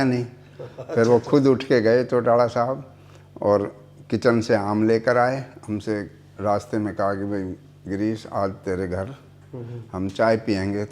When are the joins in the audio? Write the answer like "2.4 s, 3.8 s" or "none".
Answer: 5.5 s